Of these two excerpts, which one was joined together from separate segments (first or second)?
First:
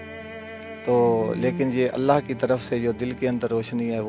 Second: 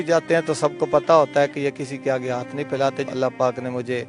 second